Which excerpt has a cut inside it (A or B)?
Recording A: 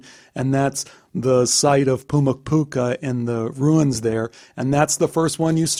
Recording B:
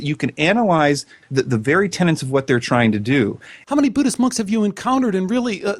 B